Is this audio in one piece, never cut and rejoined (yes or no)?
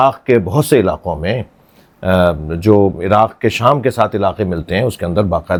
yes